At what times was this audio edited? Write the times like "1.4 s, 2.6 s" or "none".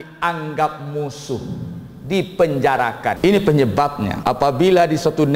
3.2 s, 4.1 s